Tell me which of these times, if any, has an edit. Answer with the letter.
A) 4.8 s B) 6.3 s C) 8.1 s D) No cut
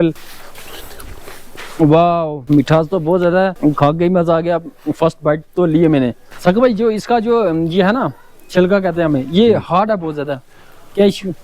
B